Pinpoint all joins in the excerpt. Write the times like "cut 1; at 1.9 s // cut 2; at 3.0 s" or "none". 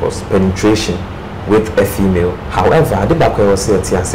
cut 1; at 2.4 s